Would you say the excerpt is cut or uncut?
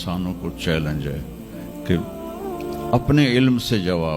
uncut